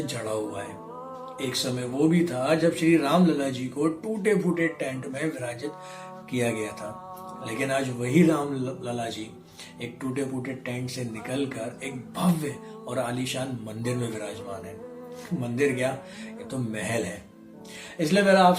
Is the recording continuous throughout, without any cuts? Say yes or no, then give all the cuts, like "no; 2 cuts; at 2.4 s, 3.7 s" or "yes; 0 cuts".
yes; 0 cuts